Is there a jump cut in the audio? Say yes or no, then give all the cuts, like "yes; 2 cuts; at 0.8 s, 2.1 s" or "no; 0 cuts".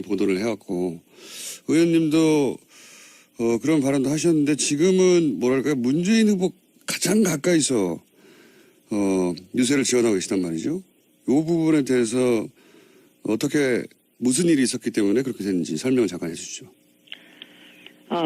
yes; 1 cut; at 8.8 s